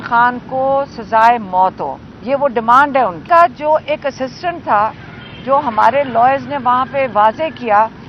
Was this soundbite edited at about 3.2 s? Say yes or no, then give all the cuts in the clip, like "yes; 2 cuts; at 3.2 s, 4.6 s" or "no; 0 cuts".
yes; 1 cut; at 3.2 s